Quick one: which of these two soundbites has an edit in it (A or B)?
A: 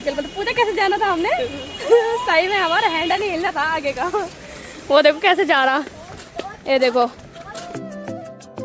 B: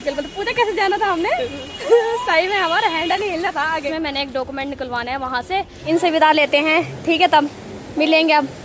B